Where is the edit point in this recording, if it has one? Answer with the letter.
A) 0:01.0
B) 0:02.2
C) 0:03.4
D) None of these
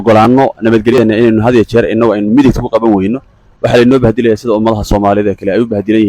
A